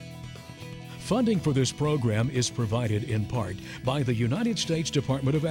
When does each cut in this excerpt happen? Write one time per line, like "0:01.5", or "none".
0:01.1